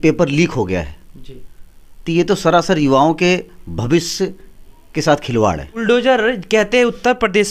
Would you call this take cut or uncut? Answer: cut